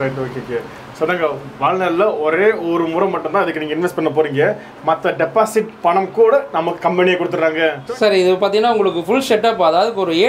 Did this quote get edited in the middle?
yes; 1 cut; at 7.8 s

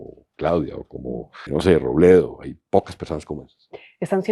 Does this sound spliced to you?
yes; 1 cut; at 1.4 s

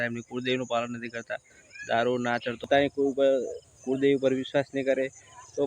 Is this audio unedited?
no; 1 cut; at 2.6 s

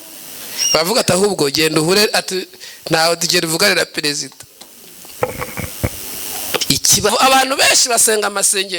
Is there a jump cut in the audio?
yes; 1 cut; at 7.1 s

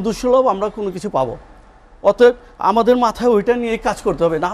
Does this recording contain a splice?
no; 0 cuts

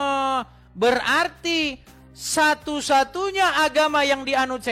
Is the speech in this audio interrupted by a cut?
no; 0 cuts

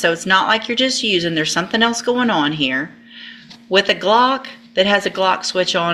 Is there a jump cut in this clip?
no; 0 cuts

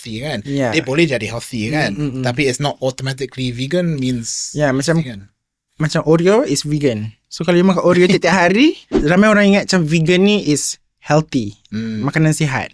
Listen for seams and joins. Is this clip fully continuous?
no; 1 cut; at 9.0 s

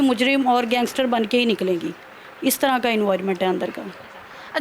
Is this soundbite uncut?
yes; 0 cuts

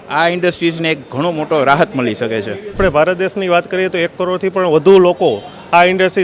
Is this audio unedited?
no; 1 cut; at 2.7 s

